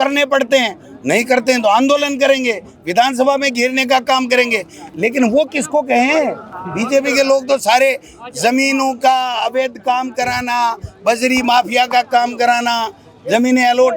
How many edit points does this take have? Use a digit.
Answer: 0